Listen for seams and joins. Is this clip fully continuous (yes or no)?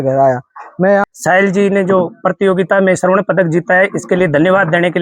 no